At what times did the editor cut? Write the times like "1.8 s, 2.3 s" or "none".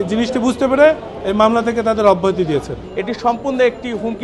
2.9 s

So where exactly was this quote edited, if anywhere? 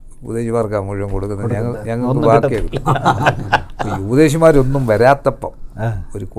none

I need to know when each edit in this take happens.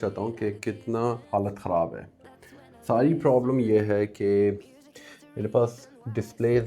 1.2 s

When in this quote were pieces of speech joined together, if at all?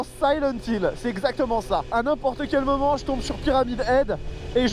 1.9 s

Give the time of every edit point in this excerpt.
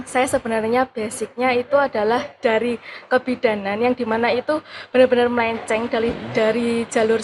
none

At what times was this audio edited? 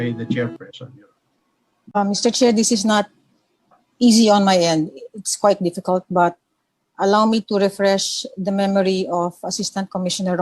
2.0 s

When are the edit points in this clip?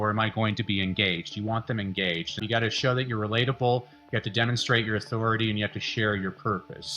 2.4 s

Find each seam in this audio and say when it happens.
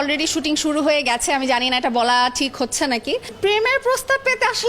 3.3 s

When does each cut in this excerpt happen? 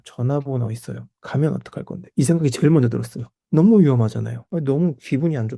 4.4 s

